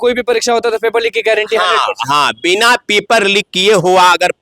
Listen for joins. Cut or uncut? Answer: uncut